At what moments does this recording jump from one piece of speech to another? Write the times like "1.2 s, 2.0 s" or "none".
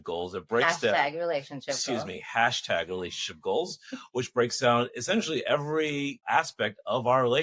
6.2 s